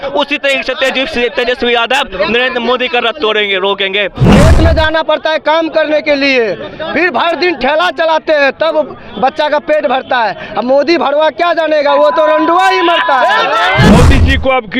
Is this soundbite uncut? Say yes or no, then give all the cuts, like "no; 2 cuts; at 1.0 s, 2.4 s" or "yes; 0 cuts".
no; 2 cuts; at 4.2 s, 13.9 s